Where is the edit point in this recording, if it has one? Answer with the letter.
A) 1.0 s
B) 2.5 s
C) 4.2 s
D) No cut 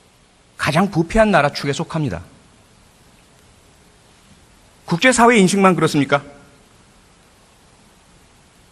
C